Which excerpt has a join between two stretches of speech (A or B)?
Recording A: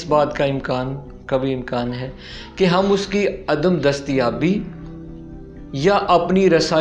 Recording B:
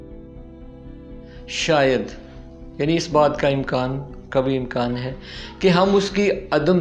B